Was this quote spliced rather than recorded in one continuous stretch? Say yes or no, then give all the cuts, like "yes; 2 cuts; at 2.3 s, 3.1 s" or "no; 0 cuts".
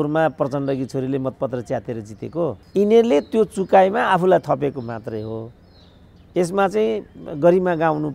yes; 1 cut; at 2.6 s